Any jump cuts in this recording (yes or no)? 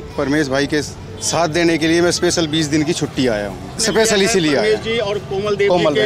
yes